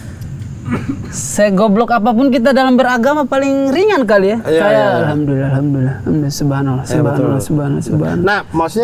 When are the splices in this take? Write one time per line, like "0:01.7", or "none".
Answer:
none